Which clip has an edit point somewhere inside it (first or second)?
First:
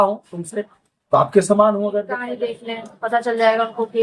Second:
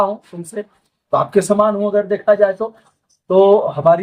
first